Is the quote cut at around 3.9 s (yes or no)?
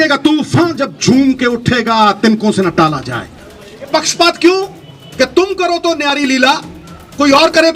yes